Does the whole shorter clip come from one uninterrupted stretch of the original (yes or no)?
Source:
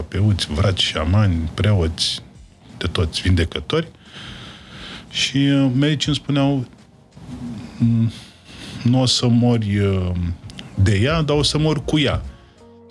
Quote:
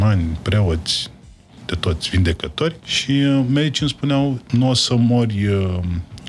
no